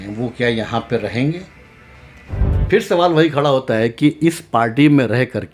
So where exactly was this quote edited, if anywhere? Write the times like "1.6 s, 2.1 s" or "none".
2.4 s

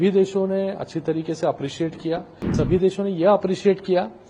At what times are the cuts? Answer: 2.5 s

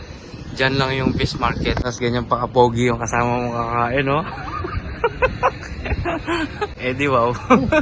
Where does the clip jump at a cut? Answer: 1.8 s, 6.8 s

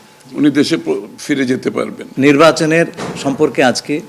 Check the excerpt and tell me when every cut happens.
2.0 s

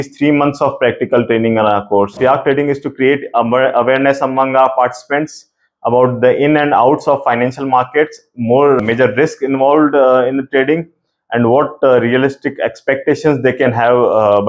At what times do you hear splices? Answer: 2.2 s, 8.8 s

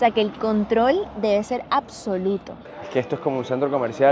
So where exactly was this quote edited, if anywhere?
2.6 s

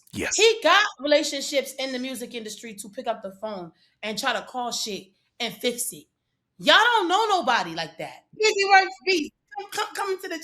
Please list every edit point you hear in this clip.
8.3 s

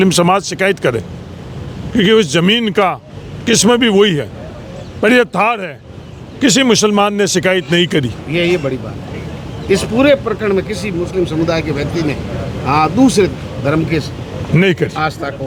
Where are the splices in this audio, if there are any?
none

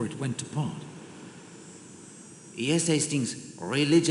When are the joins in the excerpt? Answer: 0.8 s, 2.5 s

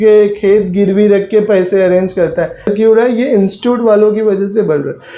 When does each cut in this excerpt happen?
2.7 s

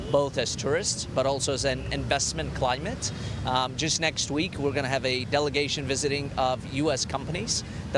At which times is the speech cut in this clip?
none

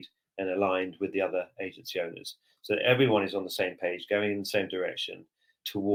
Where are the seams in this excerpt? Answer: none

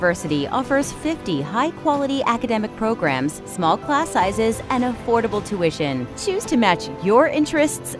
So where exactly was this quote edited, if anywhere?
none

